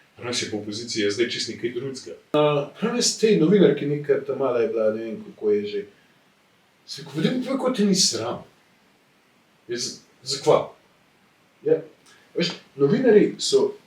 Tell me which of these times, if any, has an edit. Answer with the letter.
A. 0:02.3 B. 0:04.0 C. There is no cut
A